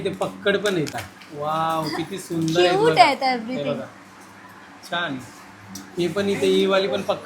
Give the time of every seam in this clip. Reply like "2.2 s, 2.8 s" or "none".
0.9 s